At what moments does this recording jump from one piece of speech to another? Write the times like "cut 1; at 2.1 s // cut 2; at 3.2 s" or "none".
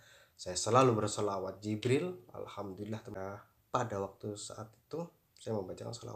cut 1; at 3.1 s